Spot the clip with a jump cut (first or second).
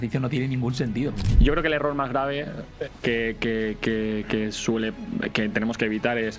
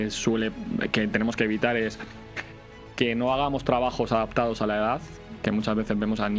first